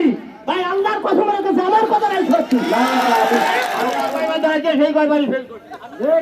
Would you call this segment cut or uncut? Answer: cut